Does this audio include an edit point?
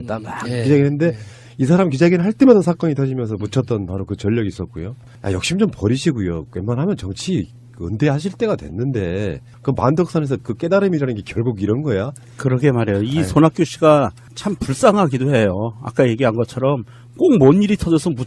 yes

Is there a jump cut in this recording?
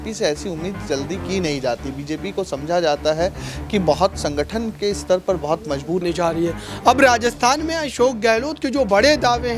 yes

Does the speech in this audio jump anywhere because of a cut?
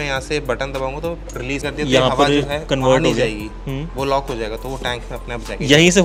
no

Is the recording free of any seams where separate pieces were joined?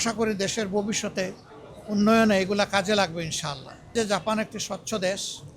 no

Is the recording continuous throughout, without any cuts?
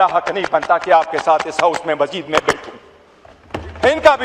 yes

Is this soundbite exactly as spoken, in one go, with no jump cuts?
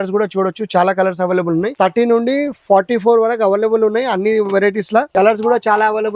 no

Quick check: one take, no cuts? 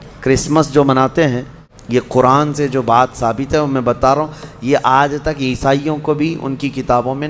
no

